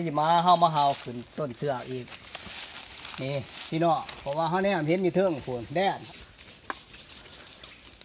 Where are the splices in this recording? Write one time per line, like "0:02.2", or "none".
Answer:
0:06.0